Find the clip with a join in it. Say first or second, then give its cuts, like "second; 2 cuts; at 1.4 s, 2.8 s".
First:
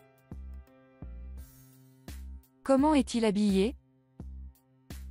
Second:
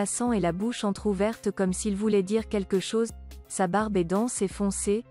first; 2 cuts; at 2.2 s, 3.8 s